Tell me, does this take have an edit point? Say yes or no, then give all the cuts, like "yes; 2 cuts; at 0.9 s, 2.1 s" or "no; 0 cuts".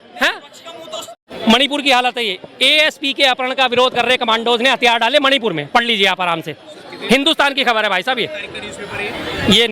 yes; 1 cut; at 1.0 s